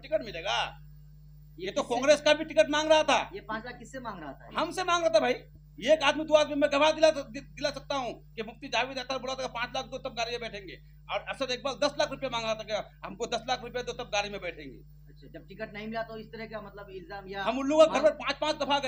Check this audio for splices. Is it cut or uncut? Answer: uncut